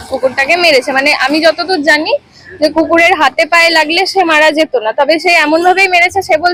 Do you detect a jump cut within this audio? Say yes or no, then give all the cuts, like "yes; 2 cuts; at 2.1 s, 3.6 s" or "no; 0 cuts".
no; 0 cuts